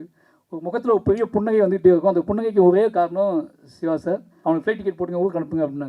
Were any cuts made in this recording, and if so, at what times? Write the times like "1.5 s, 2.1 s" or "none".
4.3 s